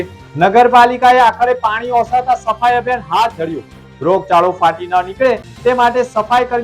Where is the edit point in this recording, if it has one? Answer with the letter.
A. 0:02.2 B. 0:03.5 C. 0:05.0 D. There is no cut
D